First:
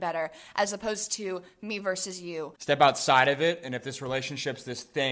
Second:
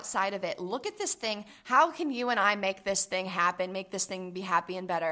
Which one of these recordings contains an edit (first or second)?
first